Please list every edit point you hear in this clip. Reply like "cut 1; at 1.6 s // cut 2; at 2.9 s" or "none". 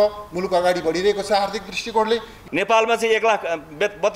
cut 1; at 2.4 s